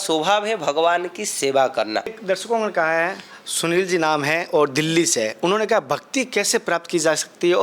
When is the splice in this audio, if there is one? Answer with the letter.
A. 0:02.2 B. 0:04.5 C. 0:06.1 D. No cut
A